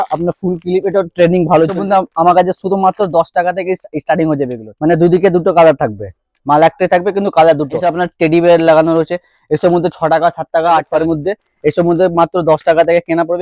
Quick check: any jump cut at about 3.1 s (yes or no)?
no